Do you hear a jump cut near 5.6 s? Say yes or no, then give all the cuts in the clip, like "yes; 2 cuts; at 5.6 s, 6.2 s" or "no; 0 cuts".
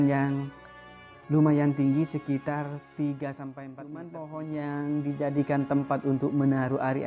no; 1 cut; at 4.0 s